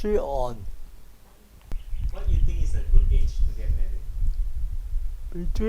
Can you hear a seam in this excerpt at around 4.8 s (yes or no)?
no